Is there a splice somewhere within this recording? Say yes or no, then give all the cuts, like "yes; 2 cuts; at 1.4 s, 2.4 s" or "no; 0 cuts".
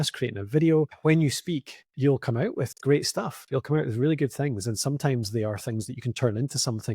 yes; 1 cut; at 0.9 s